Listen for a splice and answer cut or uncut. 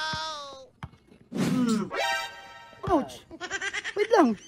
uncut